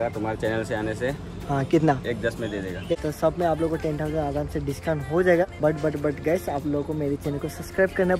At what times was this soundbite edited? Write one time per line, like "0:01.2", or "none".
0:02.9